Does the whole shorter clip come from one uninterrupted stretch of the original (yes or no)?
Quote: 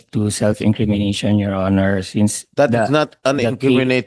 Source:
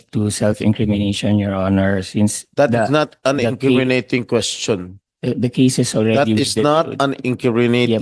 yes